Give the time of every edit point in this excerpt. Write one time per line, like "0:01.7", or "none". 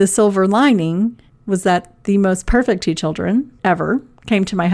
0:01.3
0:03.5